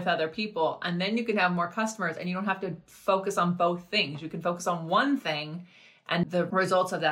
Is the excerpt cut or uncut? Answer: cut